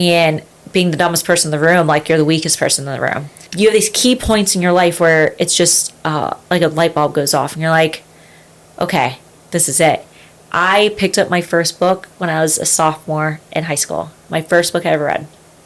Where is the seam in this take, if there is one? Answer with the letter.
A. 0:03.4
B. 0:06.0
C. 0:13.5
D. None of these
A